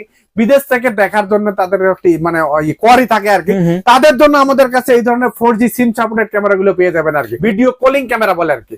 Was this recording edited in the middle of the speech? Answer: yes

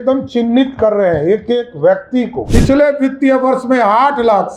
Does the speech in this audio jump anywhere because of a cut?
yes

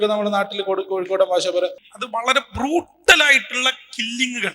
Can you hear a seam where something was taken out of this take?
yes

